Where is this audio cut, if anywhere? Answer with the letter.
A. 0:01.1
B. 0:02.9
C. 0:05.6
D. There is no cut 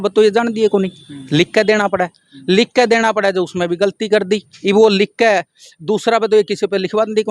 D